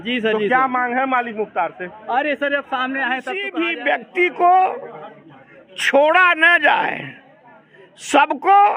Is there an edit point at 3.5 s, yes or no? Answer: yes